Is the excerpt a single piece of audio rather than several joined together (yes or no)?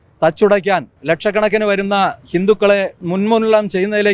no